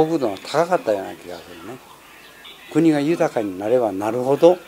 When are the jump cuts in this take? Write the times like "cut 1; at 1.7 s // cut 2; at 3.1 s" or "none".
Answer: cut 1; at 2.5 s

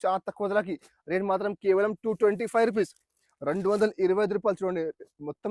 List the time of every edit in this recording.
none

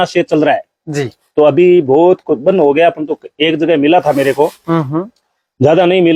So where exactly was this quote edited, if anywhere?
none

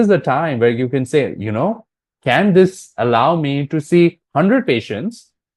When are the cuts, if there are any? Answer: none

